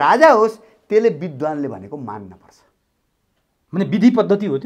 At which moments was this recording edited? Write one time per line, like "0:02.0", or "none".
none